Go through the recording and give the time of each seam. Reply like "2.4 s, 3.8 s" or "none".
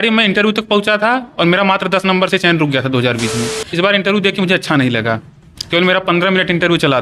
3.7 s